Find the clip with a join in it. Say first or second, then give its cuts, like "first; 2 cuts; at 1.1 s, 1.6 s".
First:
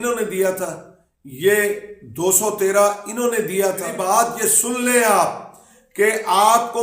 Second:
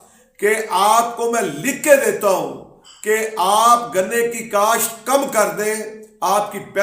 first; 1 cut; at 3.9 s